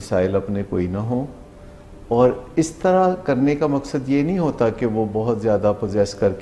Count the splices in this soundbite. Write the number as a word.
zero